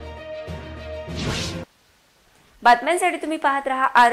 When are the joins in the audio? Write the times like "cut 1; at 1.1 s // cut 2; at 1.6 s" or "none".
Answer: none